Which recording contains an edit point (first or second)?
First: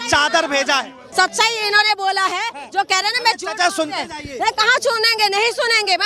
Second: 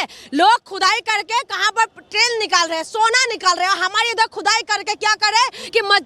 first